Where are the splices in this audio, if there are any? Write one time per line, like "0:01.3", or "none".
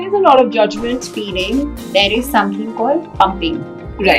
0:01.0